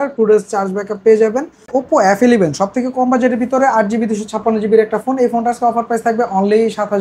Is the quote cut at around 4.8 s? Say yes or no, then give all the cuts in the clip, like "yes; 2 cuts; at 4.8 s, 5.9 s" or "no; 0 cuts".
no; 1 cut; at 1.7 s